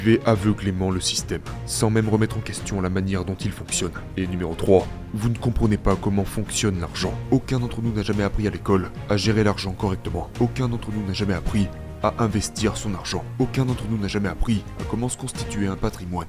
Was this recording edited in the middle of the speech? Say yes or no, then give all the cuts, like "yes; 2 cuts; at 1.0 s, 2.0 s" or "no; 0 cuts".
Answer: yes; 1 cut; at 7.2 s